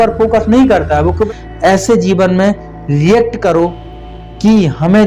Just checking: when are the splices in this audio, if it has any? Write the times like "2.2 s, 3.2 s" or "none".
1.2 s